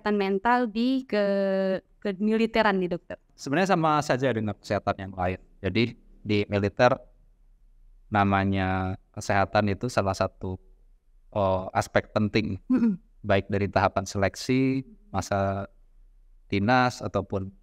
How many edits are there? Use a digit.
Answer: 1